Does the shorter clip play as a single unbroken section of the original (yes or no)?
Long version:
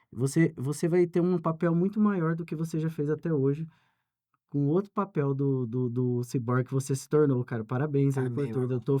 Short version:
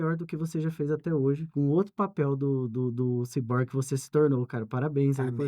no